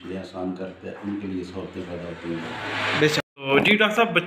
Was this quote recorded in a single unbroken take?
no; 1 cut; at 3.2 s

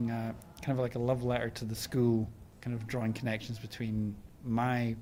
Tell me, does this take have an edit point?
no; 0 cuts

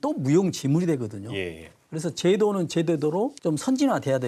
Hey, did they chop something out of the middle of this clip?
yes; 1 cut; at 3.4 s

